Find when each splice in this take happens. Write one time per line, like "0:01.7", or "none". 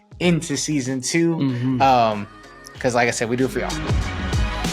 0:03.7